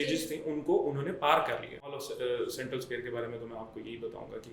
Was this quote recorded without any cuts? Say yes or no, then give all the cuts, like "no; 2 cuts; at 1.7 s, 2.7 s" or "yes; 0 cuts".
no; 1 cut; at 2.1 s